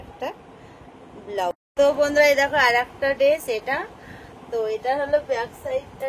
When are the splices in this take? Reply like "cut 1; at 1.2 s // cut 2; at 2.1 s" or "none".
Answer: cut 1; at 1.5 s

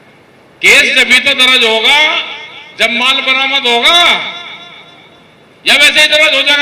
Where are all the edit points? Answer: none

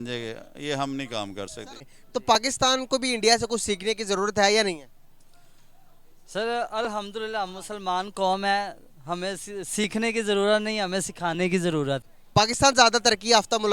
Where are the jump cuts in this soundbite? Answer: cut 1; at 1.9 s // cut 2; at 12.1 s

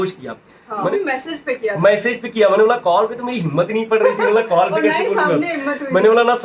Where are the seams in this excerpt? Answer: cut 1; at 0.9 s

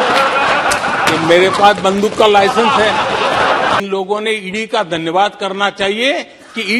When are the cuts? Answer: cut 1; at 3.8 s

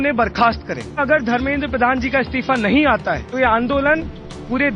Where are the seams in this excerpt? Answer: cut 1; at 1.0 s // cut 2; at 3.3 s

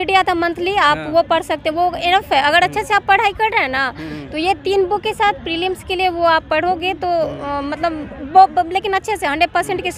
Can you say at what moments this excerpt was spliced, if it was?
none

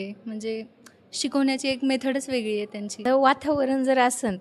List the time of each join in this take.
cut 1; at 2.8 s

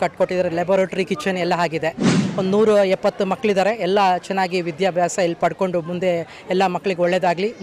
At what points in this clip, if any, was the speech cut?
cut 1; at 2.2 s

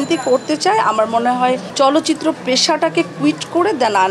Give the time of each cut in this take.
cut 1; at 1.7 s

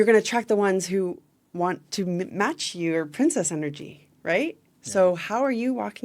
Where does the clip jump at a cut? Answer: none

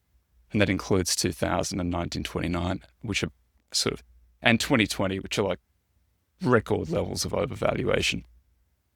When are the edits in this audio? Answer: none

